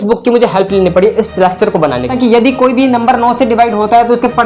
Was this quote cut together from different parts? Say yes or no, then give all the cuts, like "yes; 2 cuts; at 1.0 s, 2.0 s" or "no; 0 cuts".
yes; 1 cut; at 2.1 s